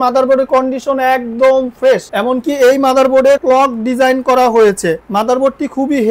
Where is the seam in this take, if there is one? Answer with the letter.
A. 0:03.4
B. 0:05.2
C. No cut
A